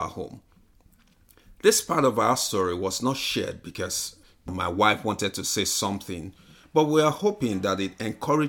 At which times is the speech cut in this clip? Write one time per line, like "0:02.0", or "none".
0:04.5